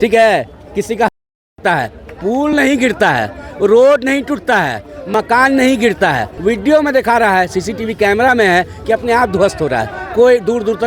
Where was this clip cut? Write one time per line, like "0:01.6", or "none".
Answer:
0:06.3